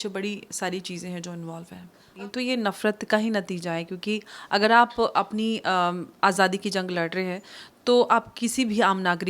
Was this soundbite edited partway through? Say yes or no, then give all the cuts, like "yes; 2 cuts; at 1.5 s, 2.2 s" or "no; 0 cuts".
yes; 1 cut; at 2.2 s